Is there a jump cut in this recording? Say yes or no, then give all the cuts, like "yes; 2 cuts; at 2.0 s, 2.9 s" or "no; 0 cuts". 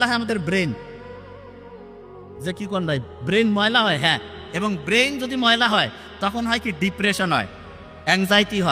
no; 0 cuts